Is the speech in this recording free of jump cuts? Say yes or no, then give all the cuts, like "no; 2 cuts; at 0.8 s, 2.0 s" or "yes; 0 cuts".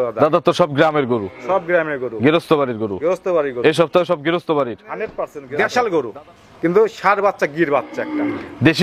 no; 1 cut; at 5.4 s